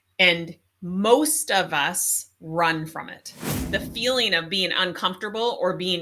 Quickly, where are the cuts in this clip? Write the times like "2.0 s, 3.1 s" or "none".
3.5 s